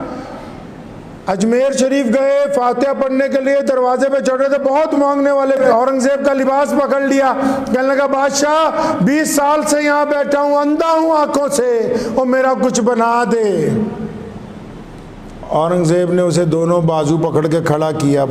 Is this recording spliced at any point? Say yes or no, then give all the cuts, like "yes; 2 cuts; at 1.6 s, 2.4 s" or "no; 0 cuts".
yes; 1 cut; at 5.6 s